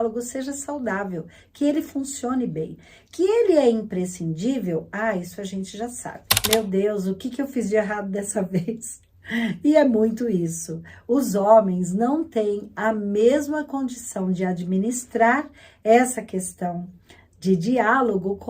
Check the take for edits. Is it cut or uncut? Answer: cut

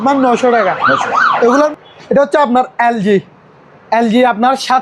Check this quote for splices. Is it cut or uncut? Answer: cut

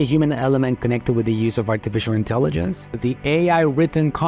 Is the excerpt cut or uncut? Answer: cut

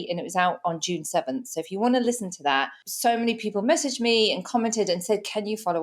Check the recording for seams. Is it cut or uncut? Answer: cut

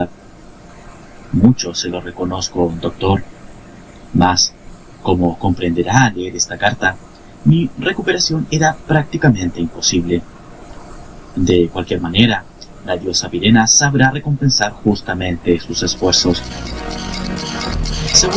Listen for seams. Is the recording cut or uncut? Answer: uncut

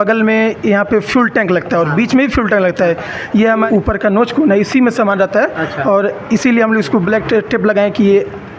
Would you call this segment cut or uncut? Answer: cut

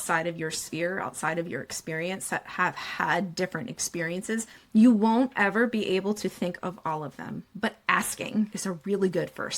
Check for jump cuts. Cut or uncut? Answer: cut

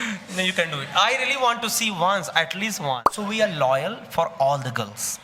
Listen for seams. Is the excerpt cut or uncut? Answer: cut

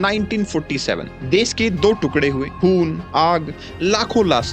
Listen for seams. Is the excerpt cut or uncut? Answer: cut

